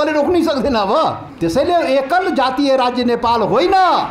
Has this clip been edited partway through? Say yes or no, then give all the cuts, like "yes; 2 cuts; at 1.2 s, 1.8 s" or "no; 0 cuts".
yes; 1 cut; at 1.3 s